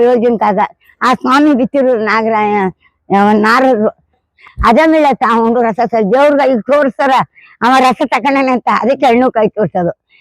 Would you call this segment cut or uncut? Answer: cut